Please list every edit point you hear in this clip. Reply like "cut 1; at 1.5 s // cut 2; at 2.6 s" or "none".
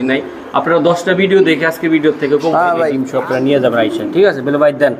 cut 1; at 3.0 s